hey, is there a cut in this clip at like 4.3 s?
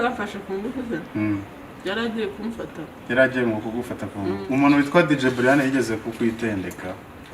yes; 1 cut; at 4.3 s

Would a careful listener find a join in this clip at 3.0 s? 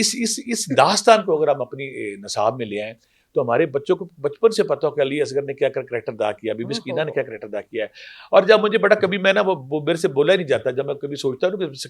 no; 0 cuts

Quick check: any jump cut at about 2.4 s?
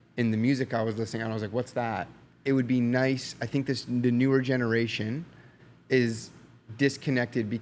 yes; 1 cut; at 2.4 s

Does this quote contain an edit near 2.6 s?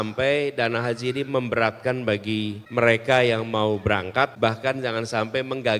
yes; 2 cuts; at 2.6 s, 4.3 s

